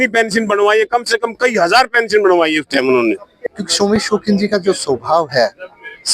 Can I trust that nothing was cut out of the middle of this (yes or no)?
no